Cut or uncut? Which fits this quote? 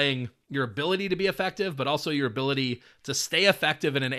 uncut